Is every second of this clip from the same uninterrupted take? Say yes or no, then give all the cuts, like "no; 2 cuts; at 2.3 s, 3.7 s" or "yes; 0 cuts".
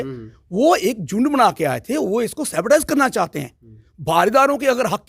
yes; 0 cuts